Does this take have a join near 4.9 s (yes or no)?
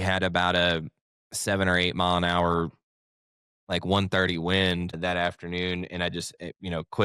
yes